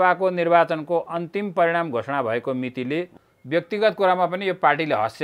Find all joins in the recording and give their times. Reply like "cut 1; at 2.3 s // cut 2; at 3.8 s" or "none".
cut 1; at 3.2 s